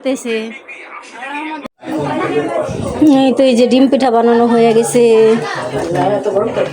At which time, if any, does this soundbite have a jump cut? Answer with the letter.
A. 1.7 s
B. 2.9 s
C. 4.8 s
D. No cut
A